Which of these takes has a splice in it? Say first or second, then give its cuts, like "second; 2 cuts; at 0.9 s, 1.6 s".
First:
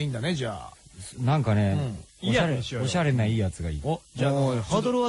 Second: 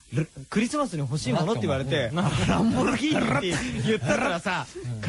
second; 1 cut; at 4.2 s